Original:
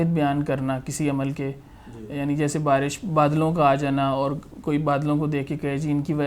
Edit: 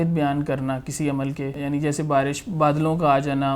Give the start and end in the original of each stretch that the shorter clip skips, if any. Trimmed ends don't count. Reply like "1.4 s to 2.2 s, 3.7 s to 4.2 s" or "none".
1.5 s to 2.1 s